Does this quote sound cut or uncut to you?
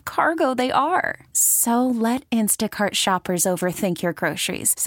uncut